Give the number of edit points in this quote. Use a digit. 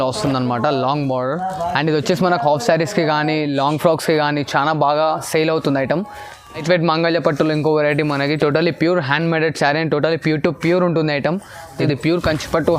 2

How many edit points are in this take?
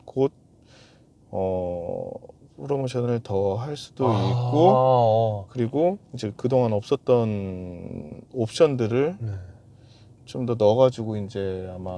0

